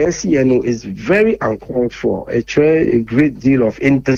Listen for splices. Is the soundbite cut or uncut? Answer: uncut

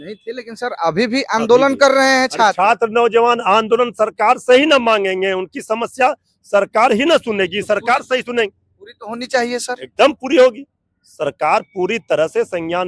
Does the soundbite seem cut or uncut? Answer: uncut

